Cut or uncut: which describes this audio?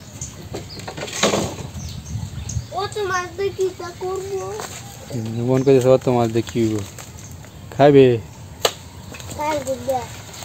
uncut